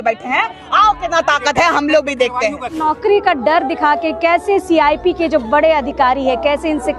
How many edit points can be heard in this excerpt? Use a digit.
1